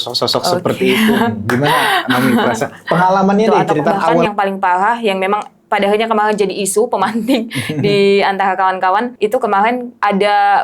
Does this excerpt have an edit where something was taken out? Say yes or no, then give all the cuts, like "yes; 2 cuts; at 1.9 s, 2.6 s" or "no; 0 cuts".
yes; 2 cuts; at 4.2 s, 9.5 s